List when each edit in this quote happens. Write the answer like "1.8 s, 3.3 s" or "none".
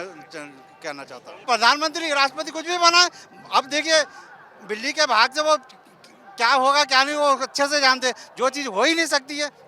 1.5 s